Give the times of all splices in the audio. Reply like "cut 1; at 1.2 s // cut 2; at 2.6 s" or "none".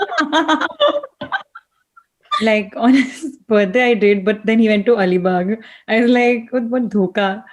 cut 1; at 2.3 s